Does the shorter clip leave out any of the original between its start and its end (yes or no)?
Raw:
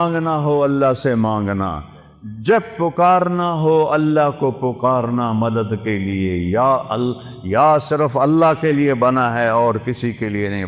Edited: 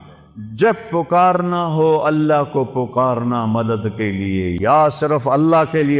yes